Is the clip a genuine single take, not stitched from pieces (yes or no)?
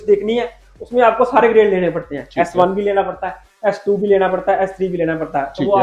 yes